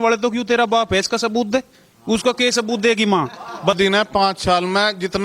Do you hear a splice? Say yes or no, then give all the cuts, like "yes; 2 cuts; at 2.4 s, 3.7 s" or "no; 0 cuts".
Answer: yes; 1 cut; at 3.8 s